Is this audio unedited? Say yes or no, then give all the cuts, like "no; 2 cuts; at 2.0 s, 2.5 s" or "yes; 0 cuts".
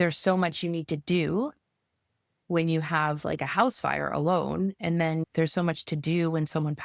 no; 1 cut; at 5.3 s